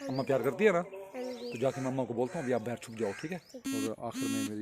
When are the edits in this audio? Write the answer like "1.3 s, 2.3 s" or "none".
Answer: 3.7 s